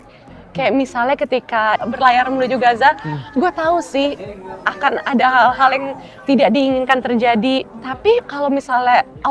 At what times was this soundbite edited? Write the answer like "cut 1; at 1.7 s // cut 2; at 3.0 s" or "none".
cut 1; at 1.8 s // cut 2; at 8.1 s